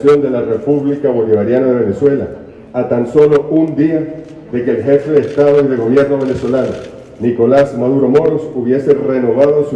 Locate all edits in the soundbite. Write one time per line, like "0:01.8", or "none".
none